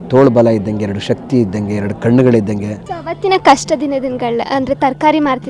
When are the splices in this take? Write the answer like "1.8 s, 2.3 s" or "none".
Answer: 2.8 s